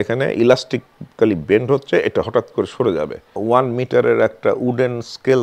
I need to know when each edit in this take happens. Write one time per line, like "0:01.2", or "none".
0:03.2